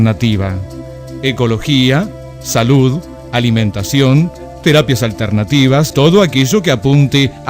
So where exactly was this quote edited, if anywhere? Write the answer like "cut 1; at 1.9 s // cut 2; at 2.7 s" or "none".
cut 1; at 5.9 s